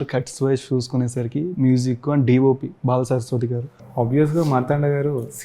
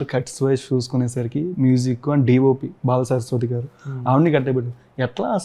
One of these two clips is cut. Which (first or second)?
first